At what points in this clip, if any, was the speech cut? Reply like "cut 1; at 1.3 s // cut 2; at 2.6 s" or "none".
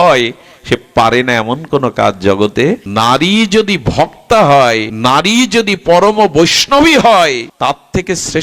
cut 1; at 2.8 s // cut 2; at 4.9 s // cut 3; at 7.5 s